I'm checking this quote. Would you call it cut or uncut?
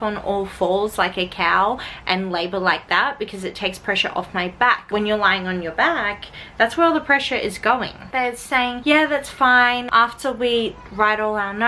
uncut